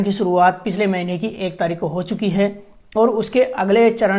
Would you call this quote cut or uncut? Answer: uncut